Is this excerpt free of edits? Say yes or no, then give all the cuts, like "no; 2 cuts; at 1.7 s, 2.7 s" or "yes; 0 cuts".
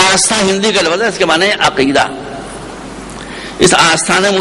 no; 1 cut; at 1.6 s